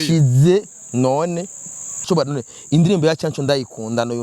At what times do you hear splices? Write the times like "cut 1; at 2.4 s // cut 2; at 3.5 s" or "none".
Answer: cut 1; at 2.1 s

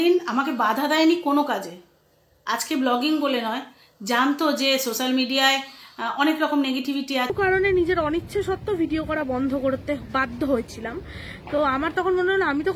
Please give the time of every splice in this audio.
cut 1; at 7.3 s

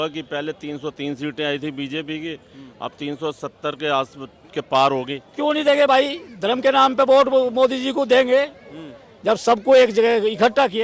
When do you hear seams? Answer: cut 1; at 5.2 s

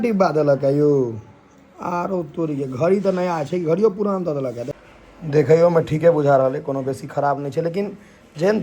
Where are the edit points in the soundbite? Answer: cut 1; at 4.7 s

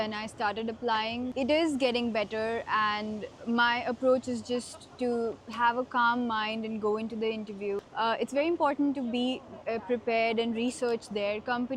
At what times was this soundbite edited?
none

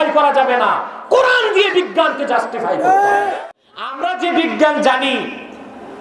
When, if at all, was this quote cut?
cut 1; at 3.3 s

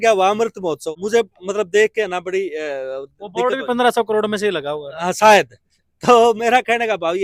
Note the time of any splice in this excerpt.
none

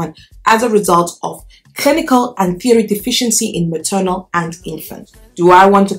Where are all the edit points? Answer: cut 1; at 5.0 s

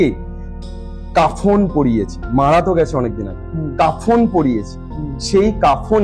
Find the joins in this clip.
none

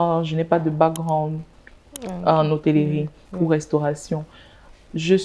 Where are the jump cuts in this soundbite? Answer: none

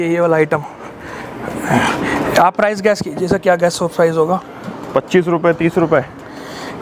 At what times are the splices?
none

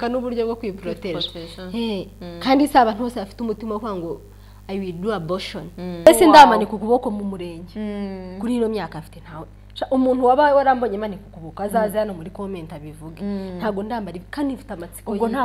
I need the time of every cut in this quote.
cut 1; at 6.1 s

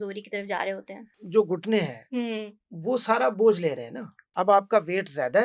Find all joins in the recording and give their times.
cut 1; at 1.1 s // cut 2; at 4.2 s

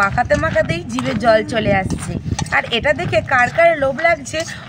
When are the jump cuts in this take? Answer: none

